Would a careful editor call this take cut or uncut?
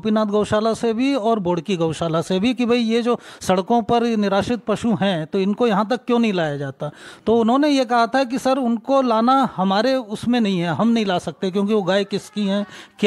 uncut